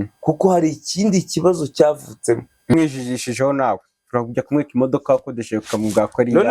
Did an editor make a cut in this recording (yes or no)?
yes